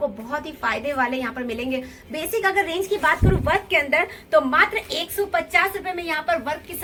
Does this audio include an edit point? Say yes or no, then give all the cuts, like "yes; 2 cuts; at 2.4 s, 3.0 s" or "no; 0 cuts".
no; 0 cuts